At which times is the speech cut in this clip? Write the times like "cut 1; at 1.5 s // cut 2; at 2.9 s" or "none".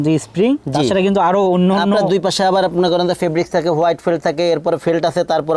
none